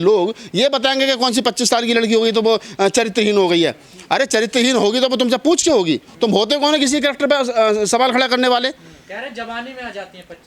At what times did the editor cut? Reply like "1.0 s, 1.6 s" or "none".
none